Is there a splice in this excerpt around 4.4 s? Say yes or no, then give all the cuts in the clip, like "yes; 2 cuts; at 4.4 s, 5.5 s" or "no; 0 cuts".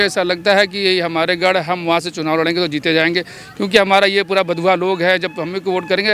no; 0 cuts